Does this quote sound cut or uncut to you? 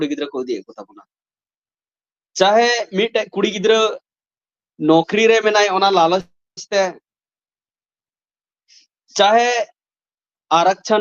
uncut